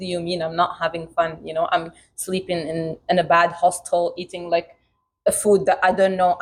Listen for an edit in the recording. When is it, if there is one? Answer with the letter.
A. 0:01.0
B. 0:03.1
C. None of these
C